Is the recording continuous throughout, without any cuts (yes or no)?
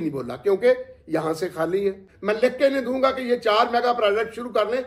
no